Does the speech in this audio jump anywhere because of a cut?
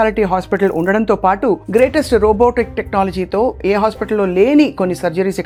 no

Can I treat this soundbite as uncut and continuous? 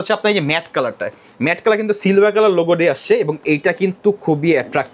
yes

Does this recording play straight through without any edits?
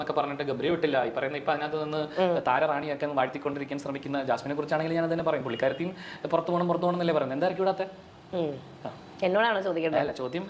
yes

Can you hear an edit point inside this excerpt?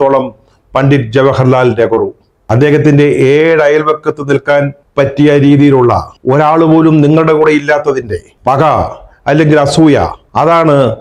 no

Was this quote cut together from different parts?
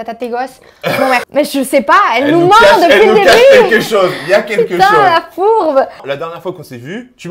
yes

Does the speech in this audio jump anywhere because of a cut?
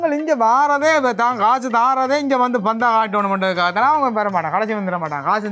no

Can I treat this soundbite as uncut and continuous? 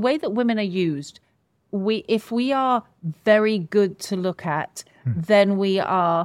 yes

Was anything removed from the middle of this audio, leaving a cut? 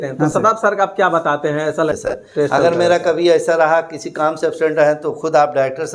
yes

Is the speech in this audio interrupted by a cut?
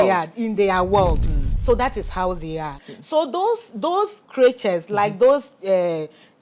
yes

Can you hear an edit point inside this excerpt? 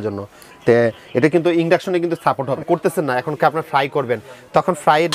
yes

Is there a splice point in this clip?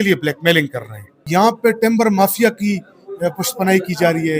yes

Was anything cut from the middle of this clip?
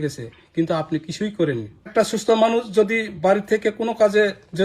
yes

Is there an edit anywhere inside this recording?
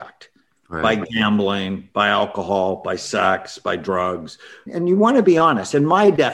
no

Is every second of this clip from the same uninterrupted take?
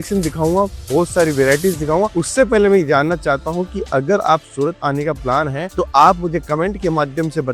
yes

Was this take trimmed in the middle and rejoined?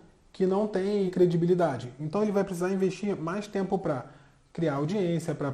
yes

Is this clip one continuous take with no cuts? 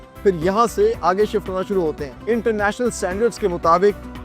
no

